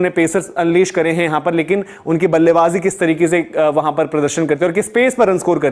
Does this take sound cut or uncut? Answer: uncut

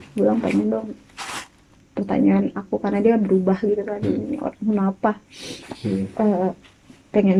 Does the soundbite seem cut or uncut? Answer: uncut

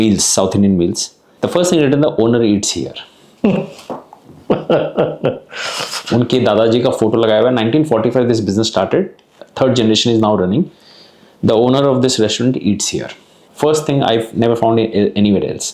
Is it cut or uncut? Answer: uncut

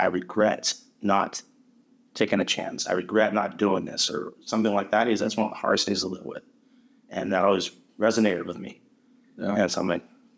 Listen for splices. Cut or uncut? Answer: uncut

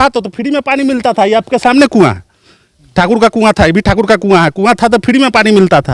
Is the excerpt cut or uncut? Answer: uncut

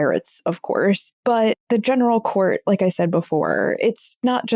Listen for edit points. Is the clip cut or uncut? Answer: cut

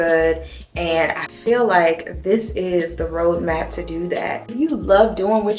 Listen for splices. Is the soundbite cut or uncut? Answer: cut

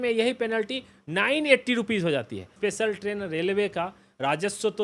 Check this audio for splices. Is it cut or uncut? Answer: cut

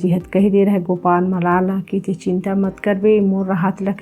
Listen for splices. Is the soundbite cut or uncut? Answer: uncut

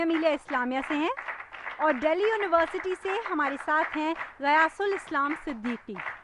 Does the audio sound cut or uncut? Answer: uncut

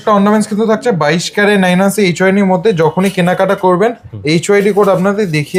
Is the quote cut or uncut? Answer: uncut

